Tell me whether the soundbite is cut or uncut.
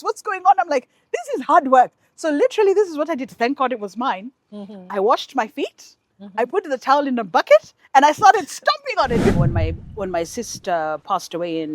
cut